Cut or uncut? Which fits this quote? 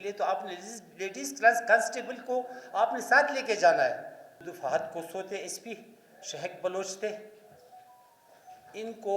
cut